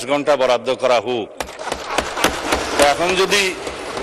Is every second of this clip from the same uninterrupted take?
no; 1 cut; at 1.4 s

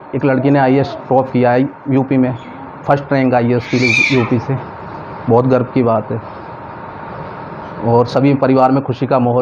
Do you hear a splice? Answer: no; 0 cuts

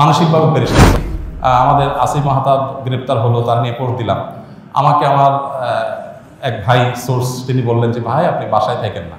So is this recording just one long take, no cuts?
no; 1 cut; at 0.9 s

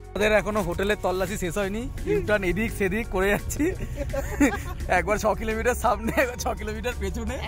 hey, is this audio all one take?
yes; 0 cuts

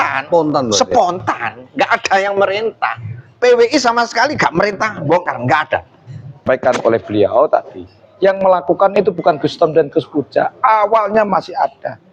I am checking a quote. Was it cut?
yes; 1 cut; at 6.4 s

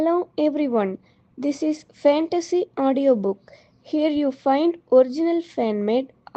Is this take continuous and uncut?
yes; 0 cuts

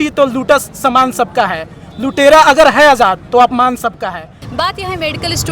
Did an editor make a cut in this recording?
yes; 1 cut; at 4.4 s

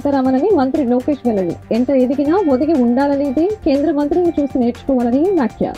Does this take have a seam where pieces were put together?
no; 0 cuts

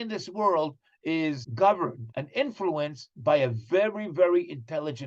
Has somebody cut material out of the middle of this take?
yes; 3 cuts; at 1.5 s, 2.1 s, 3.1 s

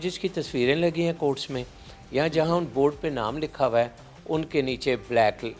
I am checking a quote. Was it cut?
no; 0 cuts

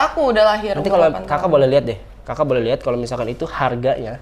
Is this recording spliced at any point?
no; 0 cuts

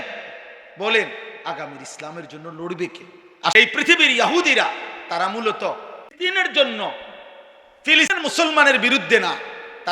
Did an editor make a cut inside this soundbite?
yes; 3 cuts; at 3.5 s, 6.1 s, 8.1 s

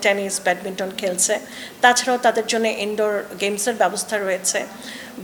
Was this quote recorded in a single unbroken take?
yes; 0 cuts

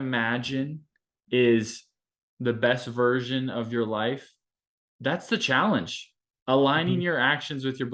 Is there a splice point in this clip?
no; 0 cuts

